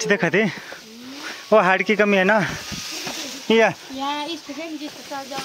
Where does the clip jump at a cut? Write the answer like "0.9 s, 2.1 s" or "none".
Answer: none